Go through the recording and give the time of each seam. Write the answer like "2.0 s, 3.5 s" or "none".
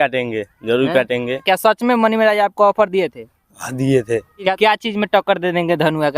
1.4 s, 4.5 s